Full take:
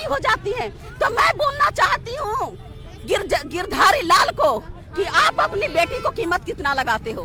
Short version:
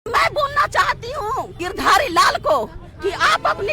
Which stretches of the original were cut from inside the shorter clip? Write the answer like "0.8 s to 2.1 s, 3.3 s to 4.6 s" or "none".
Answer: 2.6 s to 3.5 s